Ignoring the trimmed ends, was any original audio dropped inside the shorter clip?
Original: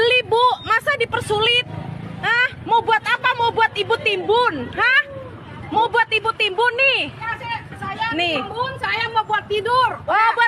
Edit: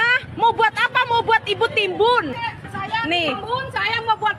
yes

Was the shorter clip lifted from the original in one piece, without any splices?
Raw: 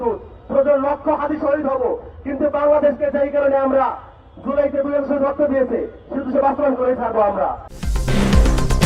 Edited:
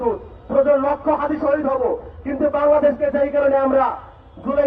yes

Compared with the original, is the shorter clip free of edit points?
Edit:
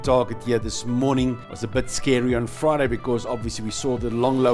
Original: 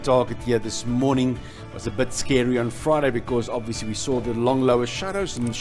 no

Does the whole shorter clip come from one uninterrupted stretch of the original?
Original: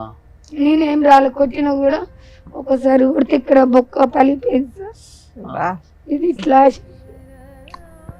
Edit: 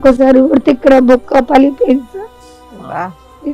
yes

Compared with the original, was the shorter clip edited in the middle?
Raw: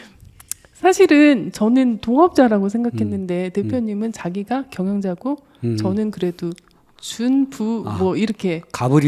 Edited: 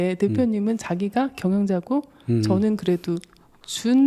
no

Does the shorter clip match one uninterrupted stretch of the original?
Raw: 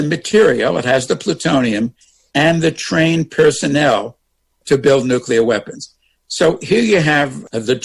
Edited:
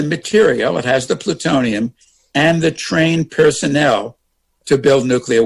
yes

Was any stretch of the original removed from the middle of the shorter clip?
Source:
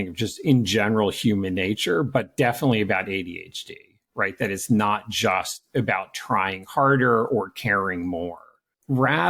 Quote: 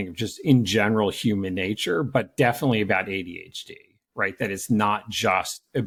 no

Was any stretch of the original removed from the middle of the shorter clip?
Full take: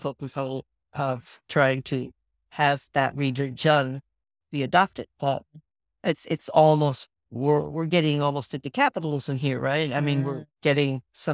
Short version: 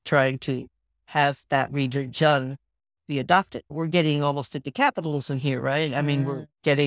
yes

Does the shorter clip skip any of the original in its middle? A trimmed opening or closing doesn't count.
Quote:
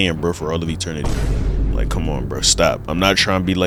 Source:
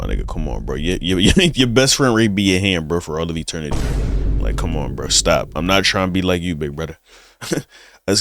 no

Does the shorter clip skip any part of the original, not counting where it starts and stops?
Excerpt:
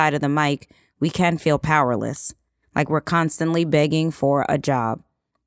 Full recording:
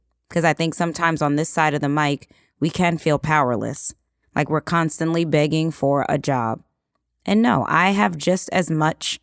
no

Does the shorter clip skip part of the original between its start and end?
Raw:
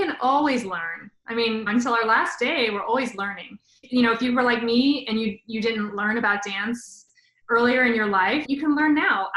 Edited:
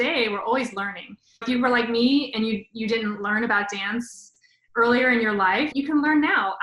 yes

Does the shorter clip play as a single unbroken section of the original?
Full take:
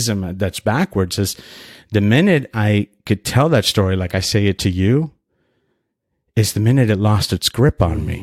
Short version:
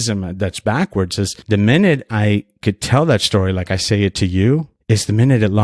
no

